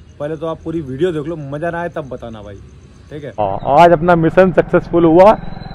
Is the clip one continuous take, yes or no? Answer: no